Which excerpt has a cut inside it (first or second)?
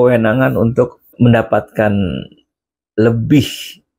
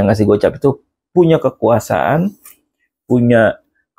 first